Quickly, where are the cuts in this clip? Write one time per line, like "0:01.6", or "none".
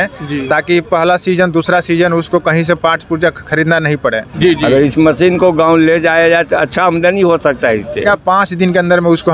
0:04.3
0:08.0